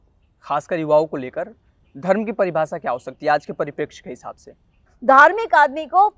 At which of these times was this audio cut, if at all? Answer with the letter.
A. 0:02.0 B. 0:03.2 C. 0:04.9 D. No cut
C